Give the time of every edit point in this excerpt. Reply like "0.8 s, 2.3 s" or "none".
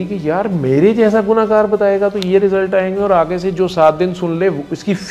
none